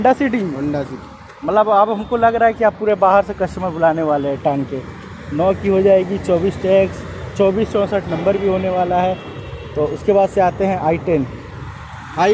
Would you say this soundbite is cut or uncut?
uncut